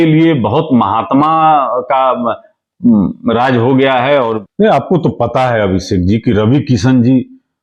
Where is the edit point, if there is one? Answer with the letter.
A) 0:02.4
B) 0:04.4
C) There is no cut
B